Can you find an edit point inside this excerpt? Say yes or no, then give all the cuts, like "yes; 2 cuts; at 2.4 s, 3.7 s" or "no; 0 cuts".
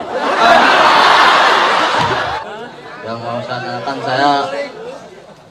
yes; 1 cut; at 2.4 s